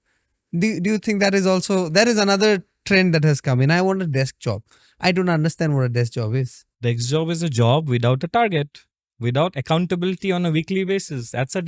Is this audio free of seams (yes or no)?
yes